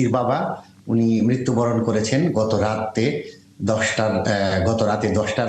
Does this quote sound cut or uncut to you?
uncut